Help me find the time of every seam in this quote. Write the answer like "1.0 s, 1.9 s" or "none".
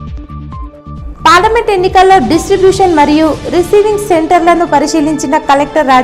1.0 s